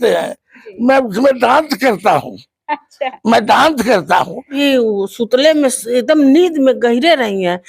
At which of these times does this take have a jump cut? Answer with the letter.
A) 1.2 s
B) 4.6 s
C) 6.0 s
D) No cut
B